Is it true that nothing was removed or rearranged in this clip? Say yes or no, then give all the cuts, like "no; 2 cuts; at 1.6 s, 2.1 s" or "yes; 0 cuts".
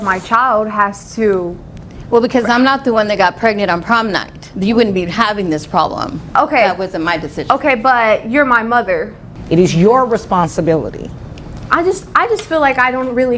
no; 1 cut; at 9.2 s